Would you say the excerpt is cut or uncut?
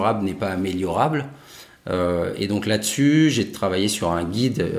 uncut